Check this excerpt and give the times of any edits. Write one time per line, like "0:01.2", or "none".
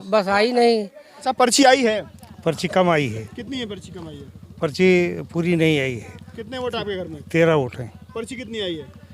0:01.3